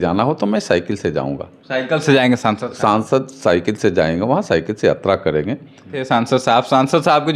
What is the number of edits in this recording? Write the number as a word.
one